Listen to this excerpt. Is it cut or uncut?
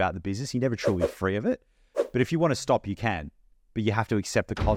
uncut